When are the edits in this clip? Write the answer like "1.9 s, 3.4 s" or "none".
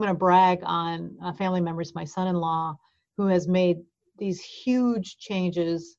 none